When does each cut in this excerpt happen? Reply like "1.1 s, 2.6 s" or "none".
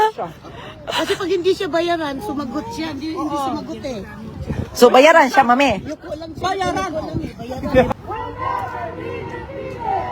7.9 s

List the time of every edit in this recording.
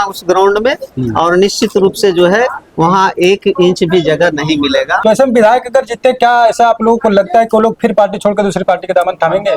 4.9 s

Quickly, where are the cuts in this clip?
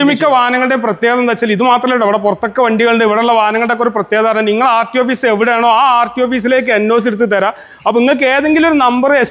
none

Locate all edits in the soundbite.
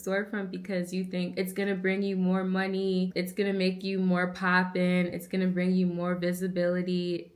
1.3 s

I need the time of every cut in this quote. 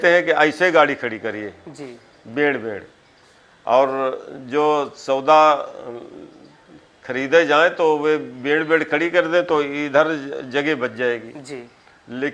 none

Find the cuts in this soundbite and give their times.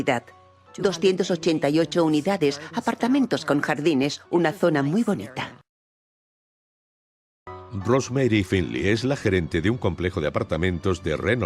9.6 s

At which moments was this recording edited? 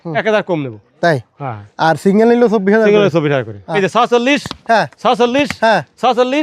3.6 s

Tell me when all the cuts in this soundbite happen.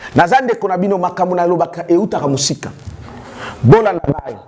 none

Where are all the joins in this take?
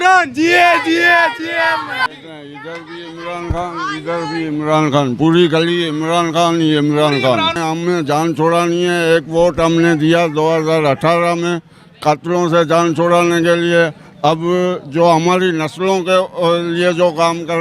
2.1 s, 7.6 s

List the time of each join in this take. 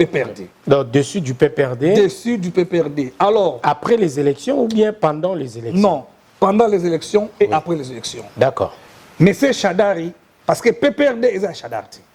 8.9 s

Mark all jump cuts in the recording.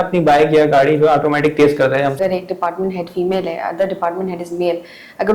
2.2 s

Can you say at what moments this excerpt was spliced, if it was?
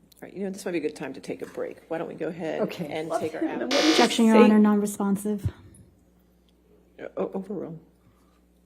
3.1 s

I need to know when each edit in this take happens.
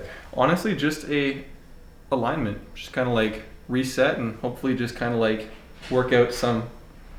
none

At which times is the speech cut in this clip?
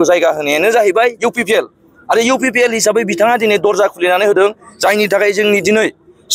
none

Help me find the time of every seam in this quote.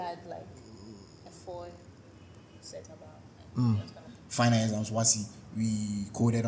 4.1 s

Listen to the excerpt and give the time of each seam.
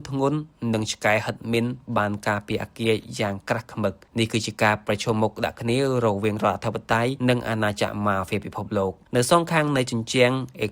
4.0 s, 7.2 s, 9.0 s

